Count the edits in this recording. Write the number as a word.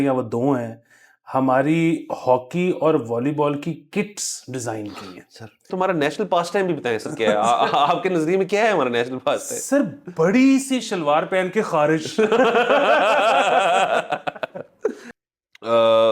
two